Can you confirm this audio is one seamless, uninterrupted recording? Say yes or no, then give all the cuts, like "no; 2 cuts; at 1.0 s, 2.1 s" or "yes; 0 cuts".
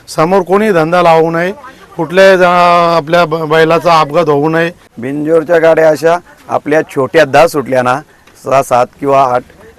no; 1 cut; at 4.8 s